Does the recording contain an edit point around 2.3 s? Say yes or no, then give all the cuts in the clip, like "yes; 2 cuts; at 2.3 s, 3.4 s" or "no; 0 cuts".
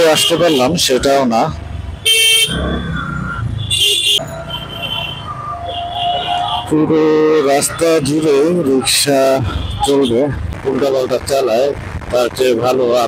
no; 2 cuts; at 4.2 s, 10.4 s